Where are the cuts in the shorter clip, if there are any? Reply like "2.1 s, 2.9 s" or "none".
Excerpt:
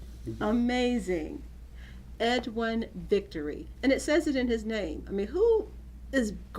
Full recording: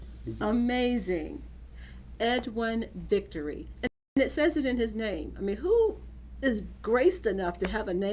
3.7 s